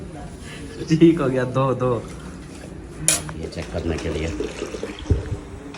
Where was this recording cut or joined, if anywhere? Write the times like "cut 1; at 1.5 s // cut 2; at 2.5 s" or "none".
cut 1; at 3.4 s